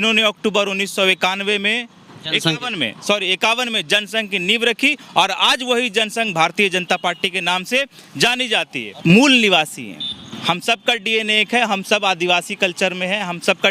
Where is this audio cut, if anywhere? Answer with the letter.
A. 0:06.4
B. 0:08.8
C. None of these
B